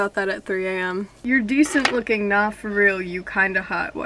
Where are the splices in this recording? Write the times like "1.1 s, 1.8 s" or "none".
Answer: 1.1 s